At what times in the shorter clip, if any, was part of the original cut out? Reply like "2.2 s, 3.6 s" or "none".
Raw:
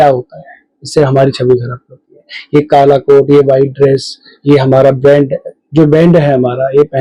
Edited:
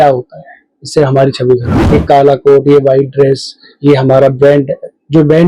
1.7 s